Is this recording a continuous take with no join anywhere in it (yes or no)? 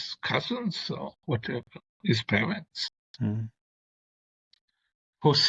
yes